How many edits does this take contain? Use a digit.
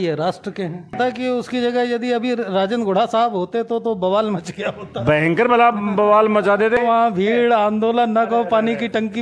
2